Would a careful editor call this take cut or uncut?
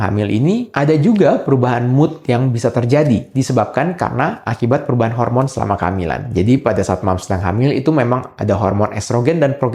uncut